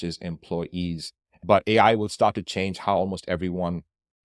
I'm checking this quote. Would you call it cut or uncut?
uncut